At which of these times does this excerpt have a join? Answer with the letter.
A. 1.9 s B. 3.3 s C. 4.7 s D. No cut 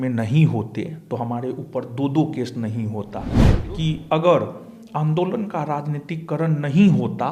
B